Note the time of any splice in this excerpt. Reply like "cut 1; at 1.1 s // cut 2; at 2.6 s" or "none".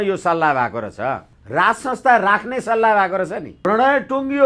cut 1; at 1.3 s // cut 2; at 3.5 s